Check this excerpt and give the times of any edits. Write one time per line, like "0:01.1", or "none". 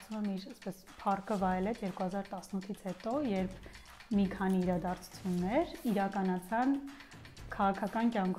none